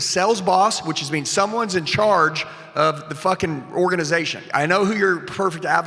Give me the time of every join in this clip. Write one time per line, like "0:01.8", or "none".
0:04.4